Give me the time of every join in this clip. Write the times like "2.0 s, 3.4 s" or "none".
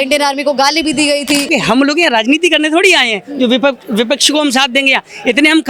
1.5 s